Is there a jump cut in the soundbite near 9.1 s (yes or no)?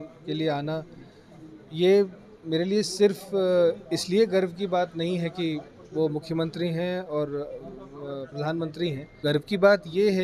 yes